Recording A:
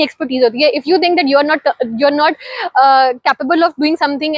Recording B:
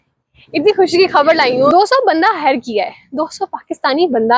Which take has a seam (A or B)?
B